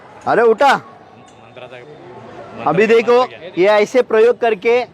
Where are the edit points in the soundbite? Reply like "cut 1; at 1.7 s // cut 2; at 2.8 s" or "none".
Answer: cut 1; at 3.4 s